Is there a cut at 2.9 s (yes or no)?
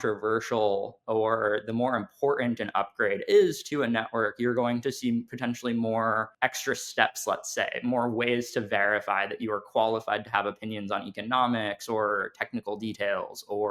no